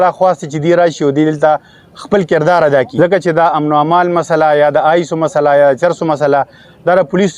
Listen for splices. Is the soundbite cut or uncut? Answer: cut